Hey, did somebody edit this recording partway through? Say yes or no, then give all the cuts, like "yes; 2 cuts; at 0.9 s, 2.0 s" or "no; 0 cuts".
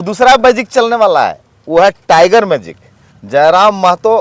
no; 0 cuts